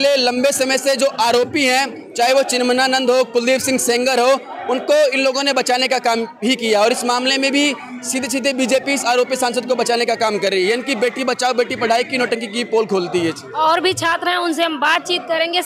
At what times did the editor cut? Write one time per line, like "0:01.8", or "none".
none